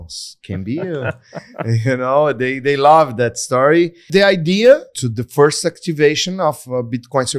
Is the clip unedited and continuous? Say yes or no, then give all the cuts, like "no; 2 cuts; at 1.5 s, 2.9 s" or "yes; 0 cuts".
no; 2 cuts; at 4.1 s, 5.1 s